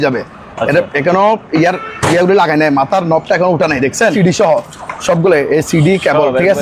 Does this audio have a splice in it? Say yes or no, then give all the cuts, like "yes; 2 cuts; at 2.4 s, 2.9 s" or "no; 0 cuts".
yes; 1 cut; at 4.1 s